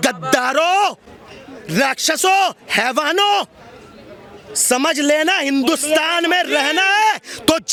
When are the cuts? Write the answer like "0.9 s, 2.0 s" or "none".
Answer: none